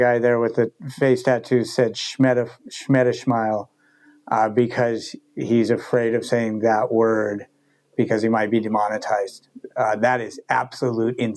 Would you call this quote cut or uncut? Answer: uncut